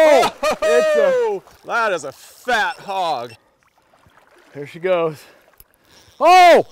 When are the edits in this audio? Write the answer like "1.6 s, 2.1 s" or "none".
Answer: 1.5 s